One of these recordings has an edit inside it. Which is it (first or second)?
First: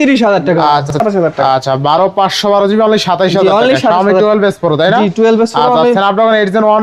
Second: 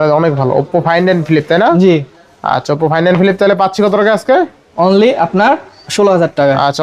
first